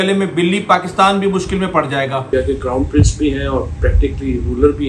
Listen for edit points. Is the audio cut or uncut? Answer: cut